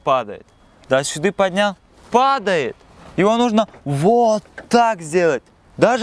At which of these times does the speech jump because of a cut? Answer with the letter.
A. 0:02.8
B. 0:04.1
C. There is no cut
C